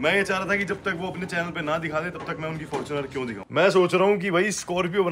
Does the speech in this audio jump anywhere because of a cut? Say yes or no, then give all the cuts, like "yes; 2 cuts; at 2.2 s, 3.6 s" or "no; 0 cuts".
yes; 1 cut; at 3.4 s